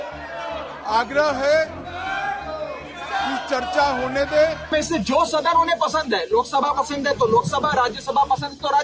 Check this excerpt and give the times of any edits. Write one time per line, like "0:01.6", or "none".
0:04.7